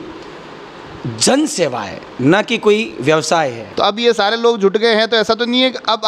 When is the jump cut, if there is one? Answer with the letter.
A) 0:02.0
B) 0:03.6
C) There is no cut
B